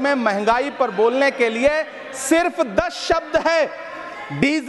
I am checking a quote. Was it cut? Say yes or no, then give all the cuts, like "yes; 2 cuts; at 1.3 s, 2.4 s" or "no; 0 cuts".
no; 0 cuts